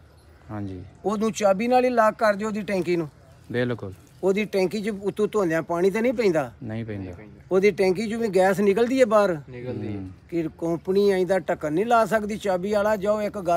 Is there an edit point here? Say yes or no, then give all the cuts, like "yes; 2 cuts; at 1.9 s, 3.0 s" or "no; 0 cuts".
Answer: no; 0 cuts